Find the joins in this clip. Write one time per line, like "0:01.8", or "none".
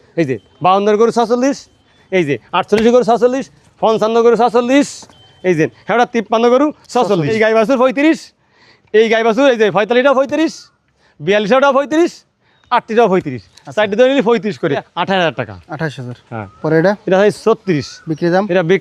0:07.3
0:14.9